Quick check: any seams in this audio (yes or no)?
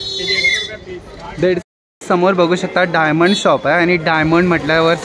yes